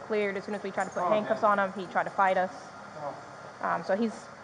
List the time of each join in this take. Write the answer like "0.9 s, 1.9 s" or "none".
none